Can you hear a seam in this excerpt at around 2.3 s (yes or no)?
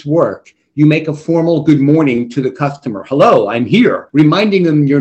no